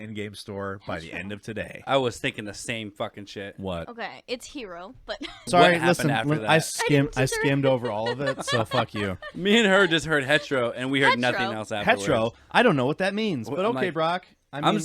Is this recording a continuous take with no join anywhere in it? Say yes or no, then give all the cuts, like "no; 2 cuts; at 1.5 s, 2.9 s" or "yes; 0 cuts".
no; 1 cut; at 5.5 s